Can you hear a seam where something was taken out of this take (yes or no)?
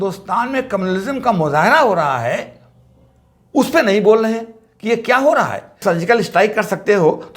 yes